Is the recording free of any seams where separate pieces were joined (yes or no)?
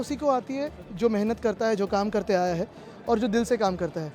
yes